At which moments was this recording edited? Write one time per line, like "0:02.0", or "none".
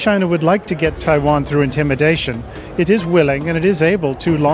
none